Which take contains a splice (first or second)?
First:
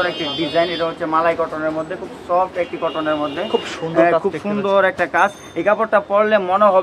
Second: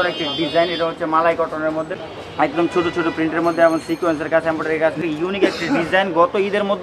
second